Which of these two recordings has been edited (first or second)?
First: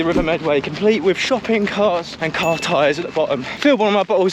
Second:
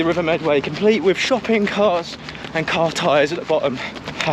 first